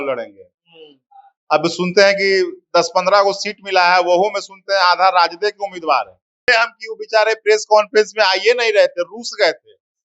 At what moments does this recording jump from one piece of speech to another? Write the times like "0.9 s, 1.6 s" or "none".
6.4 s

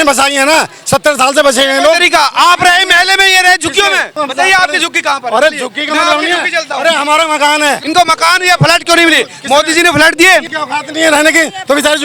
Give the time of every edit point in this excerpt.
4.1 s, 7.8 s, 10.5 s

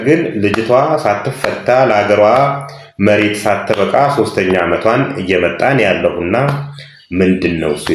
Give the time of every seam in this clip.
none

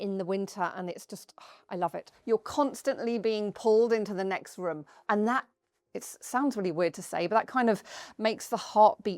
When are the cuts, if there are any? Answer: 2.1 s, 5.0 s

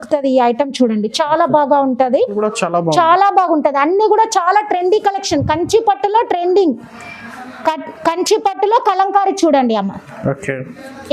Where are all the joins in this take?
2.3 s

